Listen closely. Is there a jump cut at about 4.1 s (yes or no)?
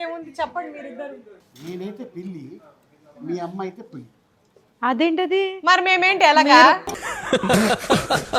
no